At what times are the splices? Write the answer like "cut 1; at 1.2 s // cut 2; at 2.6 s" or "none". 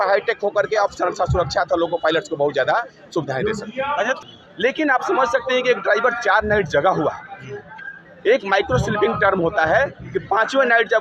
cut 1; at 4.2 s